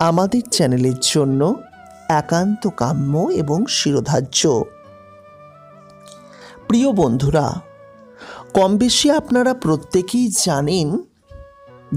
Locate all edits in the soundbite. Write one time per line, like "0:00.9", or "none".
0:05.0
0:06.7